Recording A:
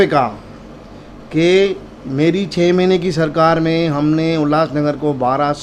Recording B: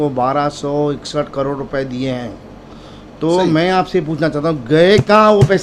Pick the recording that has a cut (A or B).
B